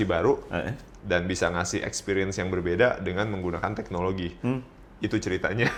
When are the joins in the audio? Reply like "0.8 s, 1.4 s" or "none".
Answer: none